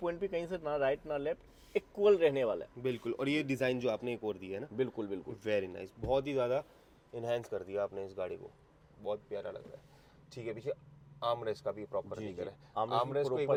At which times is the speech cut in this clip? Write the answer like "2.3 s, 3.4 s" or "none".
none